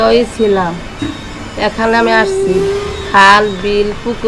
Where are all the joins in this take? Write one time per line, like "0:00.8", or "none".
none